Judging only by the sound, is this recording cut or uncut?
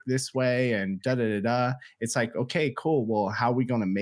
uncut